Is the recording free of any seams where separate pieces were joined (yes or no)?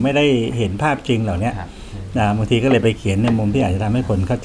yes